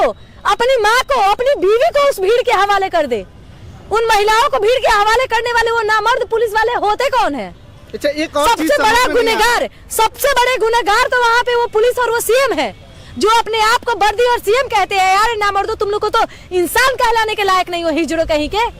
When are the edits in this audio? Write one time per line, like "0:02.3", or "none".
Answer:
none